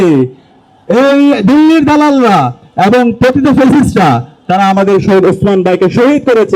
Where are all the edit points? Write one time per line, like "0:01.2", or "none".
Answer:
none